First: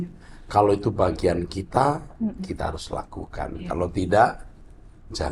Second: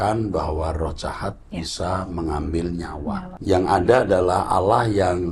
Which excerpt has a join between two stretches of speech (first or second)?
second